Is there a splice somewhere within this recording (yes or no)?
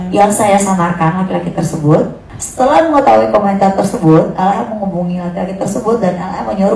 no